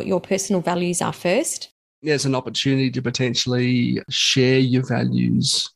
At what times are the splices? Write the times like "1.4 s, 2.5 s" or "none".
2.0 s, 4.1 s